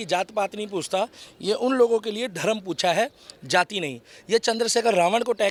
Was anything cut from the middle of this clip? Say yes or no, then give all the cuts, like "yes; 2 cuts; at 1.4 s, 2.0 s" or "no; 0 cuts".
no; 0 cuts